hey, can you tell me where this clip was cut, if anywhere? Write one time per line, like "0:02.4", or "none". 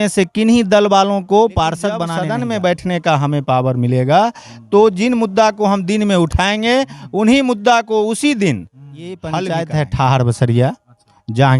0:02.1
0:09.4